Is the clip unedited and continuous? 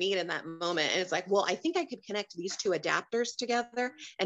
yes; 0 cuts

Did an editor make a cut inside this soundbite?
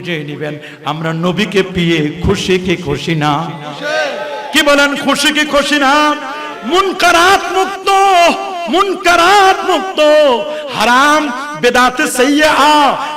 no; 0 cuts

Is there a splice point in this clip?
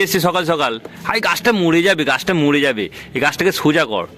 no; 0 cuts

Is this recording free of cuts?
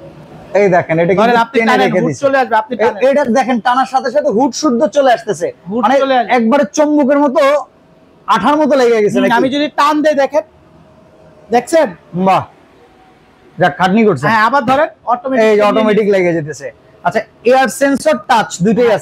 yes; 0 cuts

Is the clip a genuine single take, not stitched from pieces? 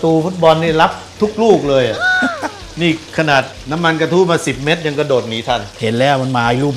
yes; 0 cuts

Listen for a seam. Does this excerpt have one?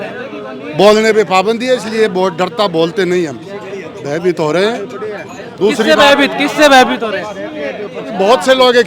no; 0 cuts

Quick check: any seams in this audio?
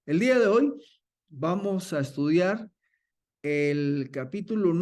no; 0 cuts

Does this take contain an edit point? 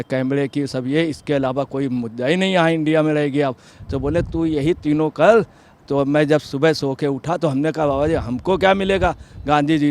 no; 0 cuts

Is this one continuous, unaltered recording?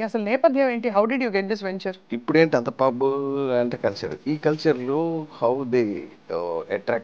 no; 1 cut; at 2.1 s

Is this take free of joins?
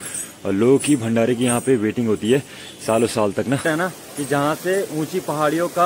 no; 1 cut; at 3.7 s

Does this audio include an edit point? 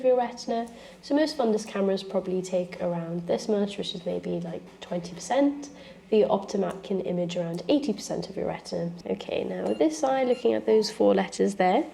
yes; 1 cut; at 9.0 s

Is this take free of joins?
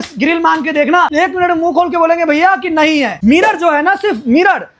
no; 2 cuts; at 1.1 s, 3.1 s

